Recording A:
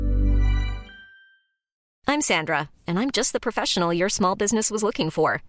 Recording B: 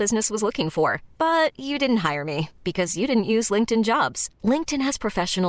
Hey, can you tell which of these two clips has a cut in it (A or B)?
A